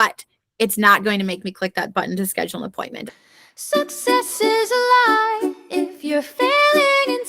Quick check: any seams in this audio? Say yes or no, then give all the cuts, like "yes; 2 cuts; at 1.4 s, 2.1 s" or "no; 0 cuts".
yes; 1 cut; at 3.0 s